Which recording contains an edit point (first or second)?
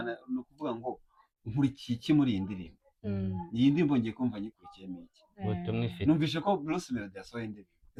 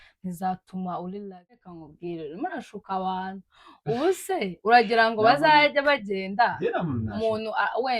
second